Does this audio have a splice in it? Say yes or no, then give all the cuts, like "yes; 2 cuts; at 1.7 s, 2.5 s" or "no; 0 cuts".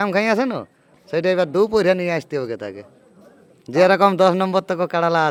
no; 0 cuts